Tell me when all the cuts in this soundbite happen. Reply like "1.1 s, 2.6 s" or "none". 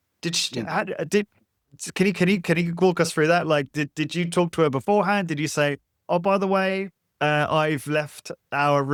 none